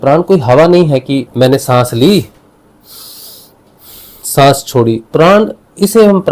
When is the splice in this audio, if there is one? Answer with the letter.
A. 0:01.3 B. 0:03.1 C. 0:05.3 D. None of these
A